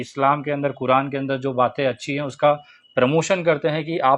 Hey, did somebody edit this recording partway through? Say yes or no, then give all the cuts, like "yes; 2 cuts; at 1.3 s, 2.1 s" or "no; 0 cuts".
no; 0 cuts